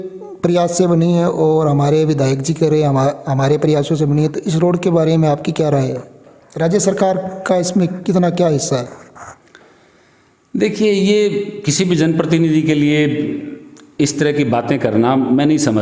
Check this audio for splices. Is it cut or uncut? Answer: uncut